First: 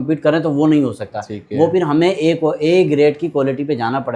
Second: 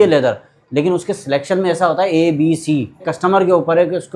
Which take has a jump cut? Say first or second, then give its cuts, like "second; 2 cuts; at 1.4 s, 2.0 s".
second; 1 cut; at 3.1 s